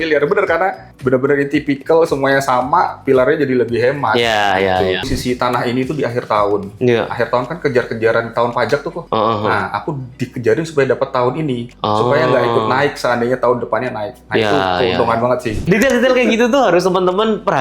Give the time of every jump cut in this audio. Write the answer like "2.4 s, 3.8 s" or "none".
5.1 s, 15.6 s